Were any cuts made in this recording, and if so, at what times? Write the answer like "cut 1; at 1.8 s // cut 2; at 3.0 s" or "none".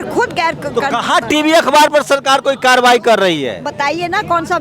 cut 1; at 3.6 s